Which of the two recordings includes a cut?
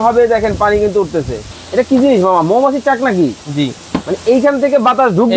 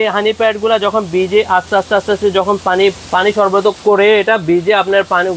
first; 1 cut; at 1.5 s

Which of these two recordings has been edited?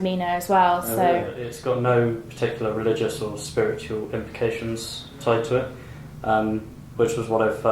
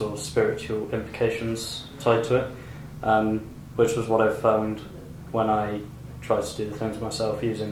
first; 1 cut; at 1.5 s

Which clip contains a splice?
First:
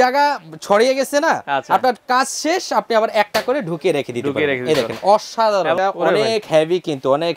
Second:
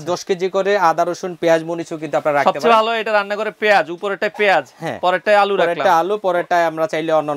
first; 1 cut; at 5.8 s

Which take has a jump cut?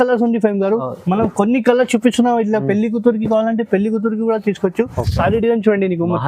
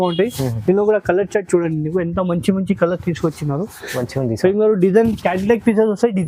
first; 1 cut; at 5.0 s

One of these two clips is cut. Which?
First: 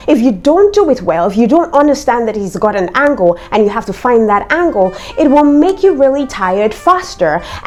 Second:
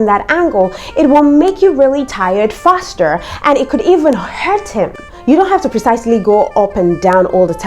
second; 1 cut; at 5.1 s

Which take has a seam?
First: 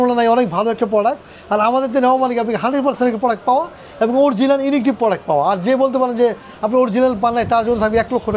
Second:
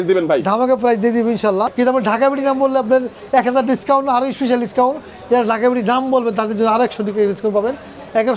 second; 1 cut; at 1.7 s

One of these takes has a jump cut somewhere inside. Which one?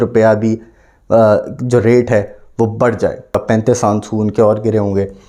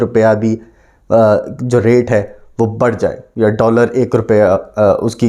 first; 1 cut; at 3.4 s

